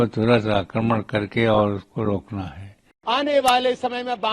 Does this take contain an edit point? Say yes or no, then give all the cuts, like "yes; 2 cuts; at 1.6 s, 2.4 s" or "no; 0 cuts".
yes; 1 cut; at 2.9 s